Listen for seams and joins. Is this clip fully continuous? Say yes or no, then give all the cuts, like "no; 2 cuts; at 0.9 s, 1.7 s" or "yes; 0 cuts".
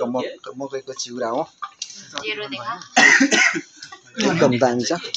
yes; 0 cuts